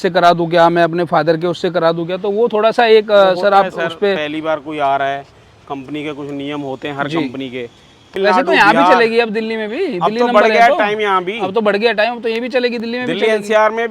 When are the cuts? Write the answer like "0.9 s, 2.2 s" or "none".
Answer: 8.1 s